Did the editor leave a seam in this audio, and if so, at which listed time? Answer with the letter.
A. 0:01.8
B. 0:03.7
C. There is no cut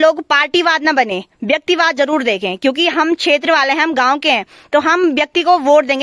C